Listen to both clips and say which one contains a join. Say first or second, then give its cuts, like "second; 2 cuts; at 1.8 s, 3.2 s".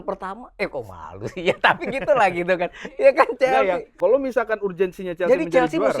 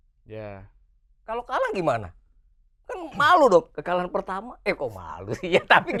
first; 1 cut; at 3.9 s